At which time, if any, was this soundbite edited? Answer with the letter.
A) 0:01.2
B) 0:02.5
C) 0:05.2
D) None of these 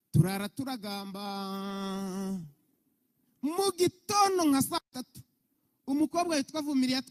D